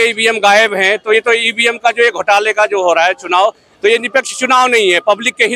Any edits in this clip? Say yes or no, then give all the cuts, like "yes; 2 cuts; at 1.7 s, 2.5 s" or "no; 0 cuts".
no; 0 cuts